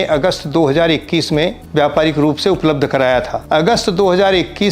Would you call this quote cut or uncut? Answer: cut